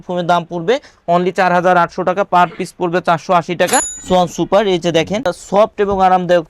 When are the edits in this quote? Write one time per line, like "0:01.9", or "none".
0:03.9
0:05.4